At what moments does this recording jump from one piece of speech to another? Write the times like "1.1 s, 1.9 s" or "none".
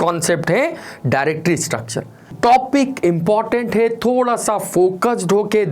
2.3 s